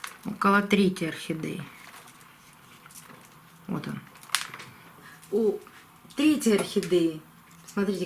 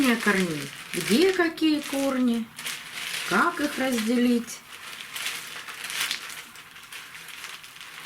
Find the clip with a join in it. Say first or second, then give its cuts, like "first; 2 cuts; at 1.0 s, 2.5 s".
first; 1 cut; at 4.9 s